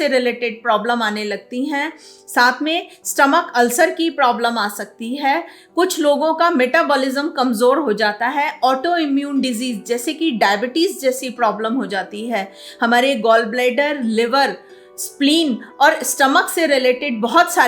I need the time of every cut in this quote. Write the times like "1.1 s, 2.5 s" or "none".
none